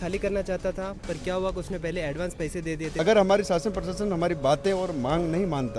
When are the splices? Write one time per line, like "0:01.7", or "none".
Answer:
0:02.9

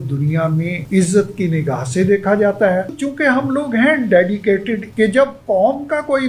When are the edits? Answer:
0:00.8
0:03.0
0:04.9

